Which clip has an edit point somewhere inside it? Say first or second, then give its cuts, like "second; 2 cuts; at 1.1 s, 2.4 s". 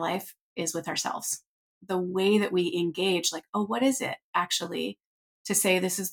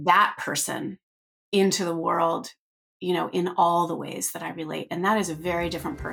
first; 1 cut; at 1.8 s